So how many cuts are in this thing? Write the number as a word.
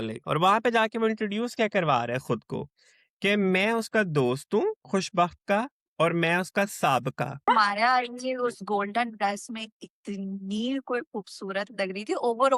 one